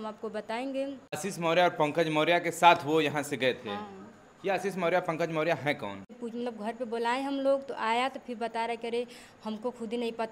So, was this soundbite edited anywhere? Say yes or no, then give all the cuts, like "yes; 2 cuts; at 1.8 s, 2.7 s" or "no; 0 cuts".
yes; 2 cuts; at 1.2 s, 6.2 s